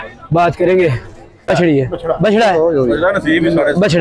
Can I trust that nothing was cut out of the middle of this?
no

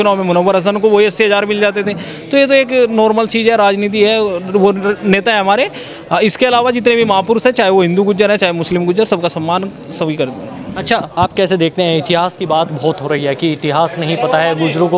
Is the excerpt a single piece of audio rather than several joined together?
yes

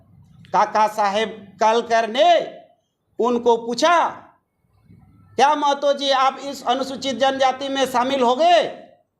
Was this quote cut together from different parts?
no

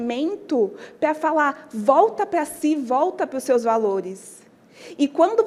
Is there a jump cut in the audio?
no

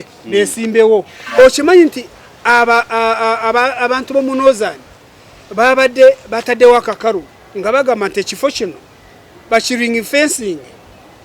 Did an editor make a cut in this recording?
yes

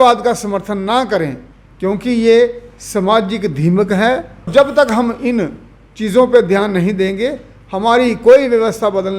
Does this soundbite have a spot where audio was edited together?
yes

